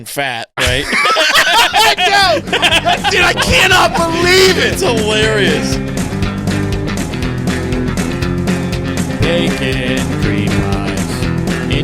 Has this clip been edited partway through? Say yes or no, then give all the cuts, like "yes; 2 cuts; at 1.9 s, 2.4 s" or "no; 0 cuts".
yes; 1 cut; at 5.4 s